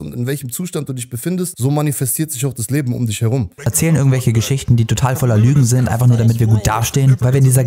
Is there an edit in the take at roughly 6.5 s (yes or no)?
no